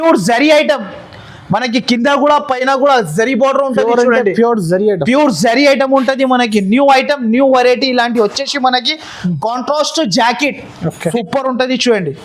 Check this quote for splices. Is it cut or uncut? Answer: cut